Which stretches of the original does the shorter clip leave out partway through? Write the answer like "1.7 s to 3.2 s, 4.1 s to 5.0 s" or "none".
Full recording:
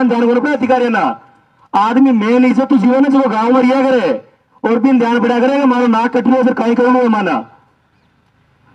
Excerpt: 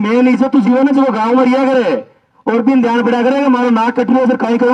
none

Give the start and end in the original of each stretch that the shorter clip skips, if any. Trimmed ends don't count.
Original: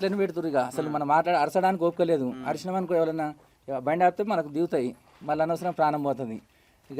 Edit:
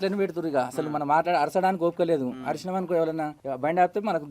3.4 s to 3.6 s

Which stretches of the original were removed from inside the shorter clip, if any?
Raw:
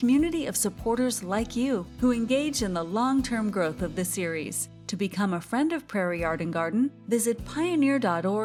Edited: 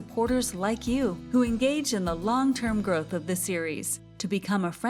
none

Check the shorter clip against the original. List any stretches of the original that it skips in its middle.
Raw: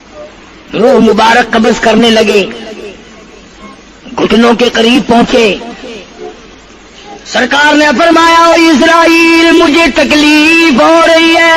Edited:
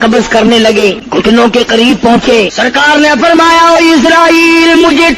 2.5 s to 4.1 s, 5.6 s to 7.3 s

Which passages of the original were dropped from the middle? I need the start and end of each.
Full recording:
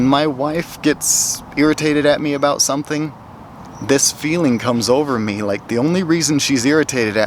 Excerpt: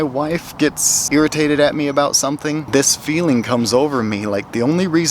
1.2 s to 1.4 s, 3.1 s to 3.8 s

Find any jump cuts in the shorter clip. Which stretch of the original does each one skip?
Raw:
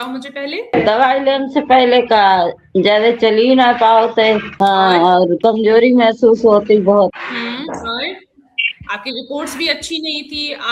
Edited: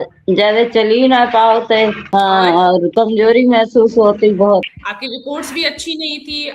7.2 s to 8.8 s

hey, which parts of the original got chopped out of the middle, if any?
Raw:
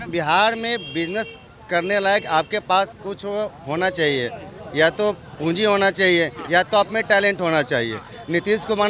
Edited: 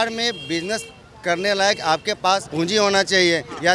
2.9 s to 5.3 s

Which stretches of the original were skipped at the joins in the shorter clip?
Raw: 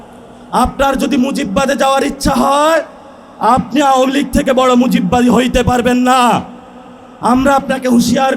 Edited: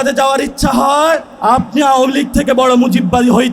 2.9 s to 3.3 s

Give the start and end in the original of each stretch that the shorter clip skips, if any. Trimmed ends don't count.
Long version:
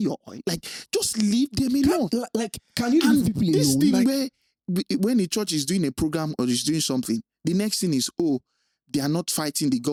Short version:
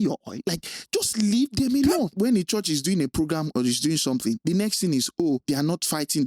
2.1 s to 5.0 s, 7.2 s to 7.4 s, 8.4 s to 8.9 s

